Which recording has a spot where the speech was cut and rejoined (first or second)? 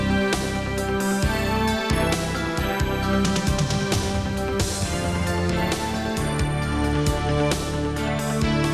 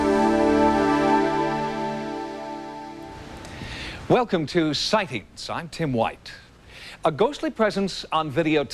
second